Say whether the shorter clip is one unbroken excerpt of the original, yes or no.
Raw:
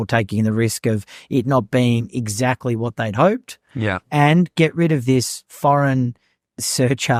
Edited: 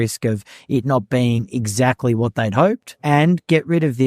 no